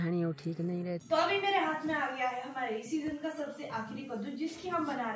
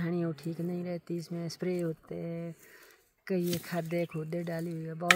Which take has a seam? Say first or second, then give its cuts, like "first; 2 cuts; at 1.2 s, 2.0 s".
first; 1 cut; at 1.0 s